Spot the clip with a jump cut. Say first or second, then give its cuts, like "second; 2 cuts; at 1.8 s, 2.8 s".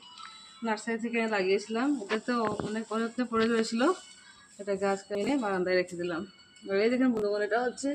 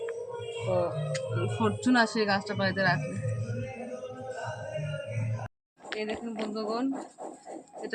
second; 1 cut; at 5.6 s